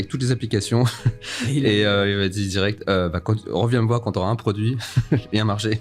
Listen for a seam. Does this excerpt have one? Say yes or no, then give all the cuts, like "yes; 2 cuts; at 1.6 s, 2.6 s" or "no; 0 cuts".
no; 0 cuts